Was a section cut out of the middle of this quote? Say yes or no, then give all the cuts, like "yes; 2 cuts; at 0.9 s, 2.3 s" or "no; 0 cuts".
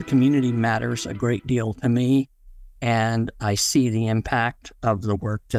no; 0 cuts